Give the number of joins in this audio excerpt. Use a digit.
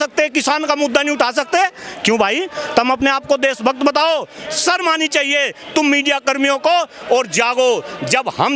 0